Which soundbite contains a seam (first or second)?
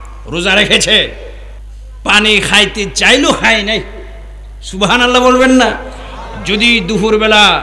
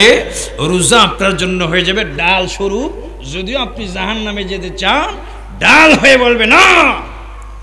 first